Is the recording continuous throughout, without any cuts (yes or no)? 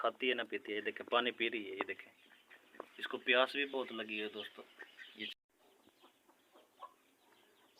no